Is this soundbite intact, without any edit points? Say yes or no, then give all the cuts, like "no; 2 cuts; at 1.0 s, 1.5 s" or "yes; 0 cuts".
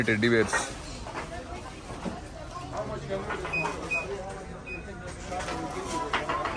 yes; 0 cuts